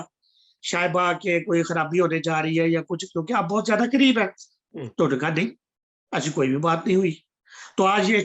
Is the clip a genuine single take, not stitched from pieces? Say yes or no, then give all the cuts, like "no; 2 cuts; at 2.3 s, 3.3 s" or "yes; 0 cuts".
yes; 0 cuts